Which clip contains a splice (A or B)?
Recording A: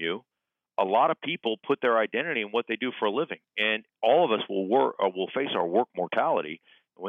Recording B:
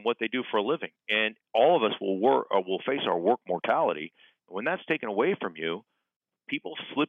B